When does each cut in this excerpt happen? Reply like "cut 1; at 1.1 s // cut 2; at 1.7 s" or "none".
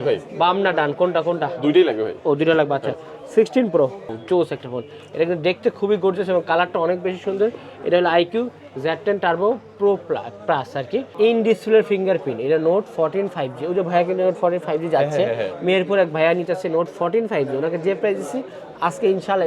cut 1; at 4.1 s // cut 2; at 11.1 s